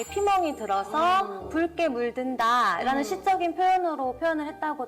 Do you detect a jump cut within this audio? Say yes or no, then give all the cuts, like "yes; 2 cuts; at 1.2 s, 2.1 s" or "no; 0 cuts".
no; 0 cuts